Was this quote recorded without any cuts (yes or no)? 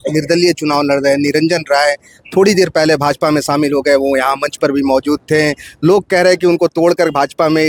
yes